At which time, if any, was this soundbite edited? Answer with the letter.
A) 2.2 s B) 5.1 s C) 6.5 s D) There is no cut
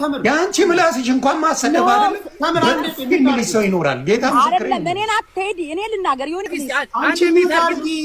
C